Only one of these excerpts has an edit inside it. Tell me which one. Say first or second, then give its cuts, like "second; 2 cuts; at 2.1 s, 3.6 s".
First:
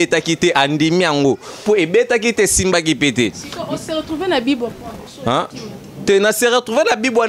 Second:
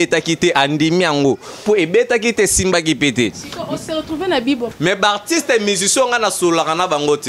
second; 1 cut; at 4.7 s